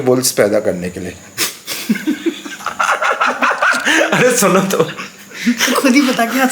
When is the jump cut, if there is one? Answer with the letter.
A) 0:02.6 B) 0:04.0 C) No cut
A